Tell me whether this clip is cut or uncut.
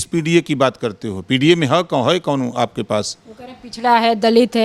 uncut